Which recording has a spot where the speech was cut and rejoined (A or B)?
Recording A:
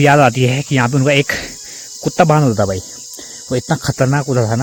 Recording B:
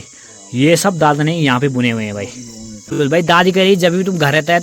B